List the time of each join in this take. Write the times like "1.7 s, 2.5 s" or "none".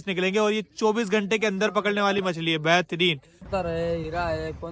3.4 s